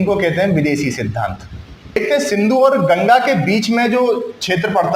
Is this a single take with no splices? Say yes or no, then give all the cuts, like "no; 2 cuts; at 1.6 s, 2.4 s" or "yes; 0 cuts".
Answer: no; 1 cut; at 2.0 s